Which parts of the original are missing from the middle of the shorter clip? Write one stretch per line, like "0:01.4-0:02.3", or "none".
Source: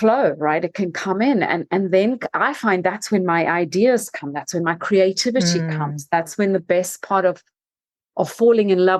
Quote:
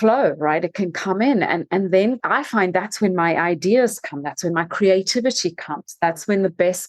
0:02.2-0:02.3